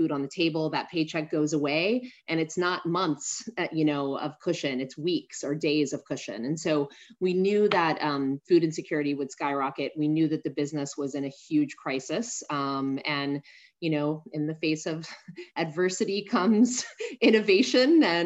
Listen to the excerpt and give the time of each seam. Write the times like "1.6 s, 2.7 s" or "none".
none